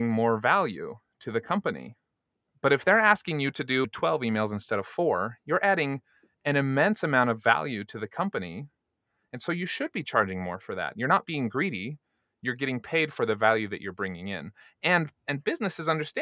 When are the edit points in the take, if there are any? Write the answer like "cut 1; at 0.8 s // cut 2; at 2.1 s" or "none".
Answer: cut 1; at 3.8 s